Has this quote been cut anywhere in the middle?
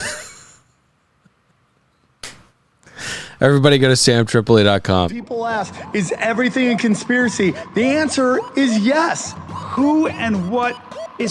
yes; 1 cut; at 5.1 s

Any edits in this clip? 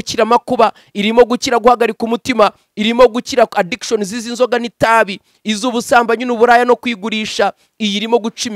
no; 0 cuts

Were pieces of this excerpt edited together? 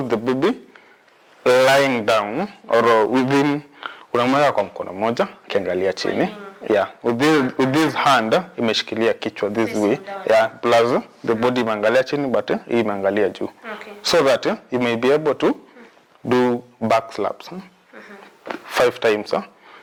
no; 0 cuts

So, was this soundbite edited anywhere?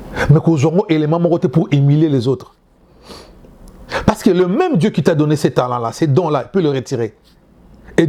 no; 0 cuts

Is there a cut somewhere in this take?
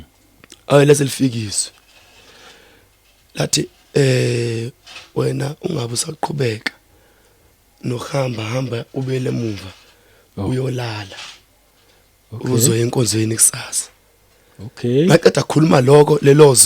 no; 0 cuts

